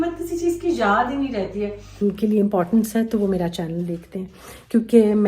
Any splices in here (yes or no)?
yes